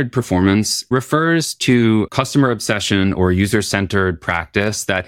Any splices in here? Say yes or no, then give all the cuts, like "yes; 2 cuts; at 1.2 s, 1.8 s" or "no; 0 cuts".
yes; 2 cuts; at 0.9 s, 2.1 s